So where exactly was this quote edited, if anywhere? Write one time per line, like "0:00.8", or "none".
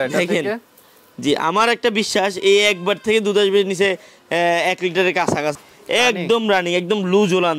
0:05.6